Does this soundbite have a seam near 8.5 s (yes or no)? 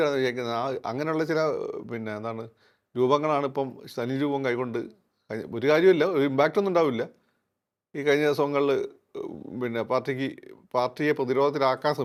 no